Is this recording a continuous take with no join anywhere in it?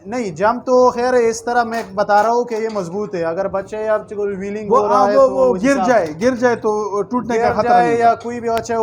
yes; 0 cuts

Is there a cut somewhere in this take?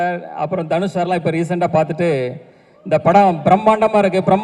no; 0 cuts

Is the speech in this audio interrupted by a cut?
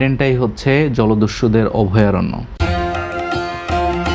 no; 0 cuts

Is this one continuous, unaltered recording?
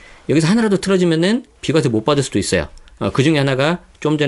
yes; 0 cuts

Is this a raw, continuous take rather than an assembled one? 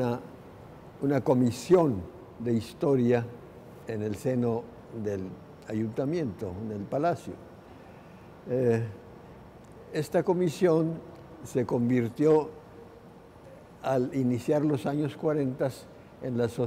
yes; 0 cuts

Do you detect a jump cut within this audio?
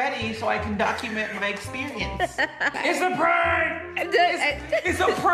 yes; 1 cut; at 2.7 s

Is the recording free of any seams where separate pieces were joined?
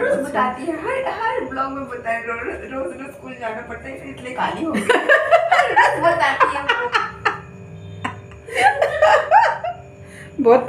yes; 0 cuts

